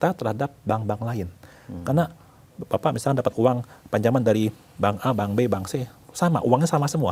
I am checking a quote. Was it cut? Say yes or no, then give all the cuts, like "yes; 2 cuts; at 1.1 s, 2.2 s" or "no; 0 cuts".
no; 0 cuts